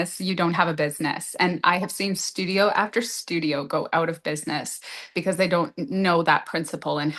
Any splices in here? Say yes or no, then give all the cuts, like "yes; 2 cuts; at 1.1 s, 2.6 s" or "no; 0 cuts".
no; 0 cuts